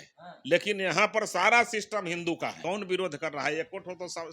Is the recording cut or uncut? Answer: cut